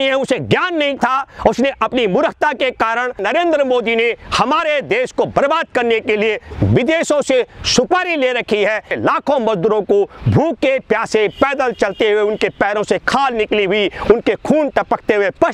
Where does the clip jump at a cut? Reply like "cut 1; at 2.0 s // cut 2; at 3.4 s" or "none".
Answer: cut 1; at 3.2 s // cut 2; at 8.9 s

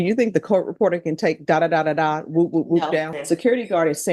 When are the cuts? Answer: cut 1; at 3.2 s

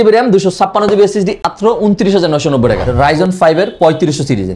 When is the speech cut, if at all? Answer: cut 1; at 1.4 s // cut 2; at 2.9 s

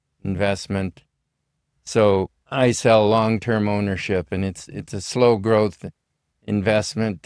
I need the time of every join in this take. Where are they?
none

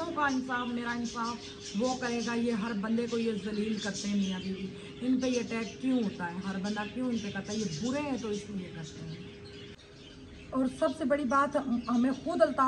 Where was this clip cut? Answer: cut 1; at 9.8 s

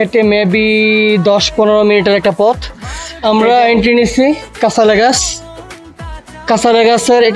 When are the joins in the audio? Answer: cut 1; at 2.6 s

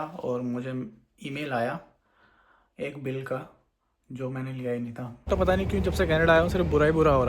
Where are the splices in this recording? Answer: cut 1; at 5.1 s

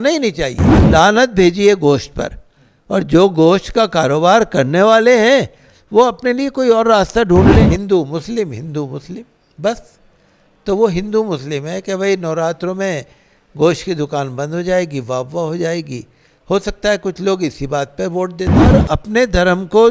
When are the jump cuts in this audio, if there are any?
cut 1; at 0.8 s // cut 2; at 7.7 s // cut 3; at 18.7 s

